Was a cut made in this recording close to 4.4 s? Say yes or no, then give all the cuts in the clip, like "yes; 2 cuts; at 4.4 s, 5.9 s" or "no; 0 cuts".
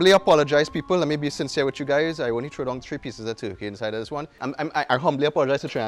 yes; 1 cut; at 4.4 s